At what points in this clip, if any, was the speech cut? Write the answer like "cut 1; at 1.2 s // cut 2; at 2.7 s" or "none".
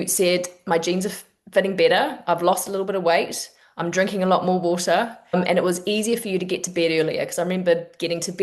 cut 1; at 5.2 s